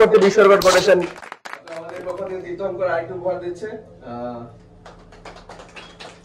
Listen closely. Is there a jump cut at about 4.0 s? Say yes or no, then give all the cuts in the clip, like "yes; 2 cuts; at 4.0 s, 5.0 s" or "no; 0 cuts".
no; 1 cut; at 1.9 s